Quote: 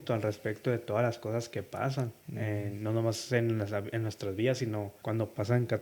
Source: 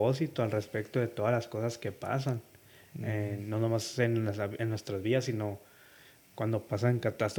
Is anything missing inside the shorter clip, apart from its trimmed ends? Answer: yes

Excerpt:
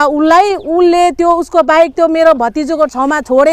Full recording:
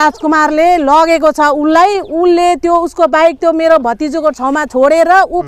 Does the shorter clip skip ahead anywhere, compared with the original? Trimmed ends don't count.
no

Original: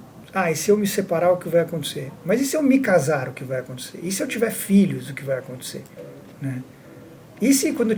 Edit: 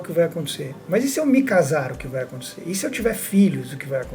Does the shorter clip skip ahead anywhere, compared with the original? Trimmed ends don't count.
no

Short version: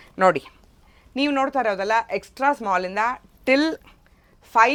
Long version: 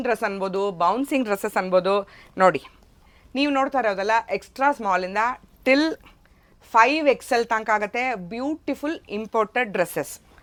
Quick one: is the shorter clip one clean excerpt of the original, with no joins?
yes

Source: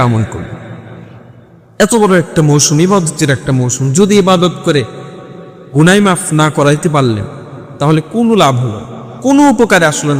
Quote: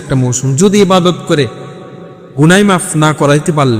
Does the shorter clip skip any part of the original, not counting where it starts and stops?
no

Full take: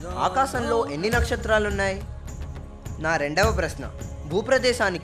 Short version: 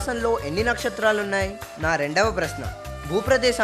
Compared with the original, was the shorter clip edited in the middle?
yes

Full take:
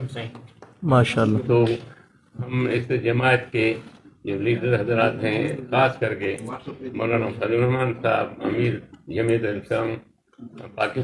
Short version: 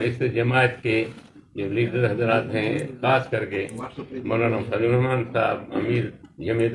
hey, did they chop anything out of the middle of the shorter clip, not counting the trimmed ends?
no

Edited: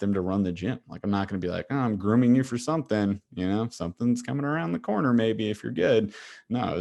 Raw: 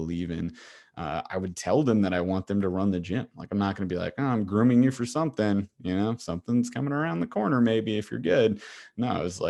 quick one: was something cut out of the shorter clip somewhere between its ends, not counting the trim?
no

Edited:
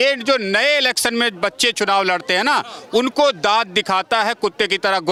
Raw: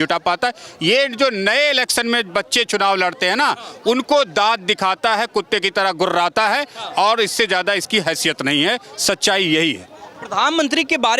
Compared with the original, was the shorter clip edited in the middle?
no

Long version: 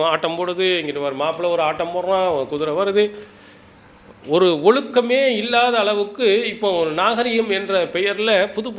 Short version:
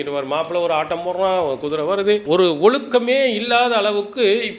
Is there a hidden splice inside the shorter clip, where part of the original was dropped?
yes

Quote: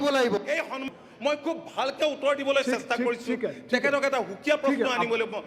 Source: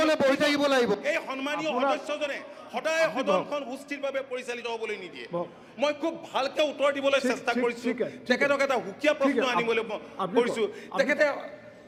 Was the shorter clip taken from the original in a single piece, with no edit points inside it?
no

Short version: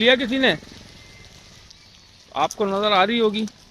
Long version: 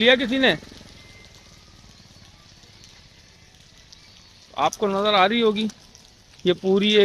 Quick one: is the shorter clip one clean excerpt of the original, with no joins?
no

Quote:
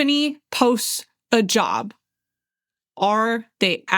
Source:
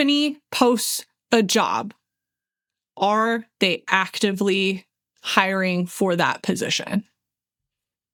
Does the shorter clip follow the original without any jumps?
yes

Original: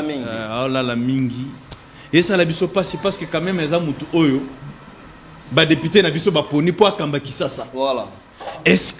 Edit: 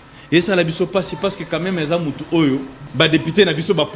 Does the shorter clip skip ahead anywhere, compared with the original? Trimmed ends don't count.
yes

